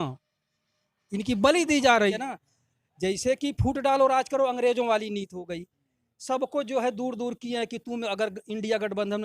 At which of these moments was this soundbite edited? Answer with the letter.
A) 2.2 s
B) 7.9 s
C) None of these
A